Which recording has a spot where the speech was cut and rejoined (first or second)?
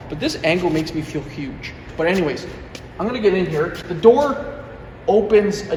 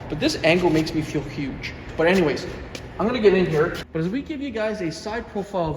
second